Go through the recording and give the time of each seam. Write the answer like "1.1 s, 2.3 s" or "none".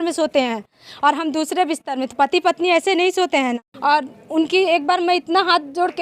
3.7 s